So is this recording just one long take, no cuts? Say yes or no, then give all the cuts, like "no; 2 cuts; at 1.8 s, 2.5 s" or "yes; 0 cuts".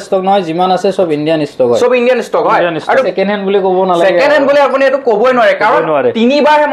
no; 1 cut; at 2.8 s